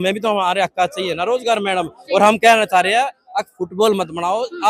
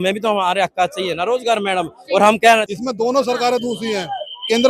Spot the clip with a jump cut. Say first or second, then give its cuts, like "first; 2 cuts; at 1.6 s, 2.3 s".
second; 1 cut; at 2.7 s